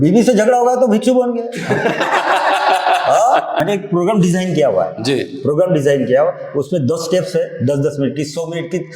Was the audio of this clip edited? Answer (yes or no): yes